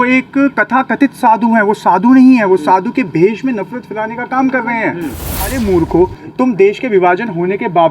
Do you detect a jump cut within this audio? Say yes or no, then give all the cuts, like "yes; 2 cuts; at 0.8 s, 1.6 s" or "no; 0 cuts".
yes; 1 cut; at 5.1 s